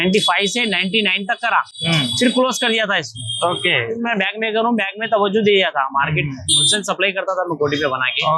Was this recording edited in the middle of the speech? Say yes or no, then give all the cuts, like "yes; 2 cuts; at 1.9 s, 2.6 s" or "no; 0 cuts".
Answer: no; 0 cuts